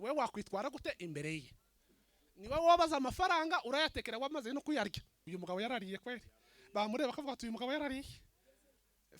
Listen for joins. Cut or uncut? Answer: cut